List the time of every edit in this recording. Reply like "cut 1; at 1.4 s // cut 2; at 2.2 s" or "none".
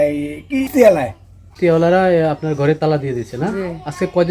cut 1; at 1.5 s